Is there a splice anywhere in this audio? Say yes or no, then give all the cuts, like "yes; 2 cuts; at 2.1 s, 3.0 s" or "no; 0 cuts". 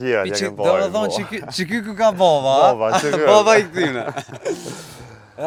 no; 0 cuts